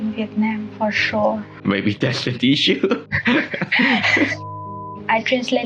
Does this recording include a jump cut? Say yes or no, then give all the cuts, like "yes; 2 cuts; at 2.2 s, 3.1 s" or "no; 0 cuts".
yes; 3 cuts; at 1.6 s, 3.0 s, 4.4 s